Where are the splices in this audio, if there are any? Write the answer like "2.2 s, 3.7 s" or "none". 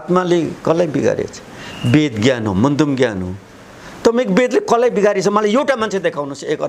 none